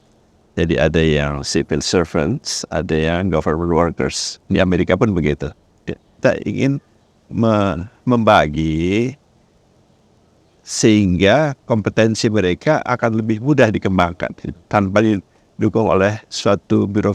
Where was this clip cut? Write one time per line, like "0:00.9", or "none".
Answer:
0:06.2
0:14.5